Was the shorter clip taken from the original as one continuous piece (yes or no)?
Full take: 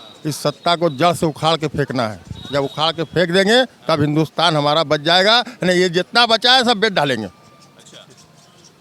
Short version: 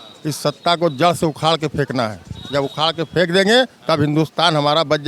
yes